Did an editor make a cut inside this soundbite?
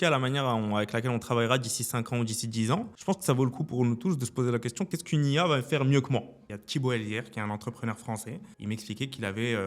yes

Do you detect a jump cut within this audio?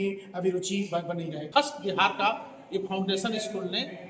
yes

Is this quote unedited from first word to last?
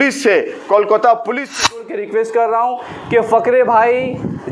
no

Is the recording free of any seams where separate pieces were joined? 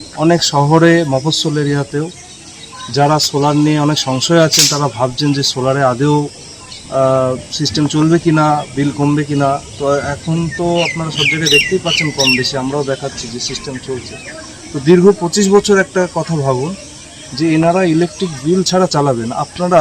yes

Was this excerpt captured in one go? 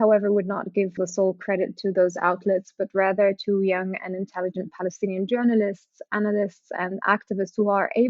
no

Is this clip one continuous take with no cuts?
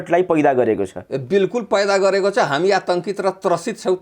yes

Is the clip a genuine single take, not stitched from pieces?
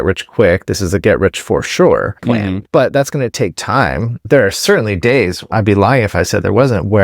no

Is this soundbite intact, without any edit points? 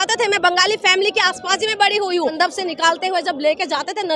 no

